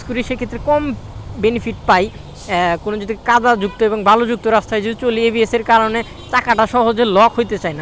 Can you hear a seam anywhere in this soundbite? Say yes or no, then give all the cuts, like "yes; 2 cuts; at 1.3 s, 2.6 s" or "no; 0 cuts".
no; 0 cuts